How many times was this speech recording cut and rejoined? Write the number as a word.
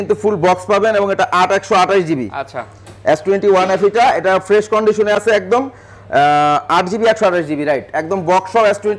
zero